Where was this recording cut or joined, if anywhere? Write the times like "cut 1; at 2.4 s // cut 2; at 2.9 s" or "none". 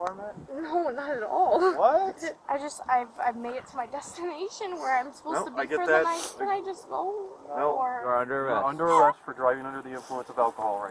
cut 1; at 2.3 s // cut 2; at 8.0 s